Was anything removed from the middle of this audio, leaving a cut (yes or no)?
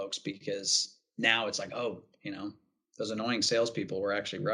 no